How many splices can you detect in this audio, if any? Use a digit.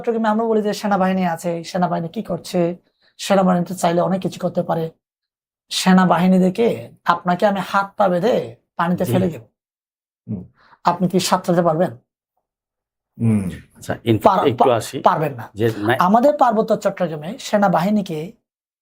0